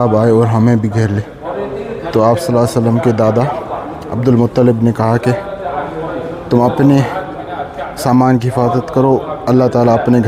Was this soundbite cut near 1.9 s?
no; 0 cuts

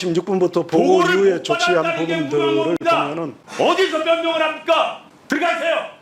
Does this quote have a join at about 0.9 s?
no; 2 cuts; at 3.4 s, 5.1 s

